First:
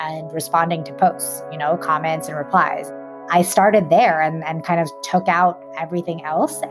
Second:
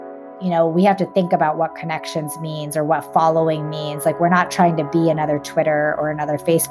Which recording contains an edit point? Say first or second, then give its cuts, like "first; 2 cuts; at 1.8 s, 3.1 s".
first; 1 cut; at 2.9 s